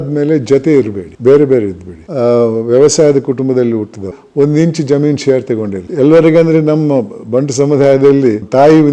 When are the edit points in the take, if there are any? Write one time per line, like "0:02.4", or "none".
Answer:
0:02.1
0:04.1